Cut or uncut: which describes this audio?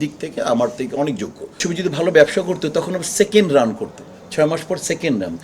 cut